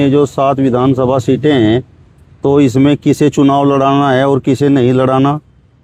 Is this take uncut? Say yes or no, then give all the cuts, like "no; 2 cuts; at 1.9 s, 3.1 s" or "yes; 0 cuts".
yes; 0 cuts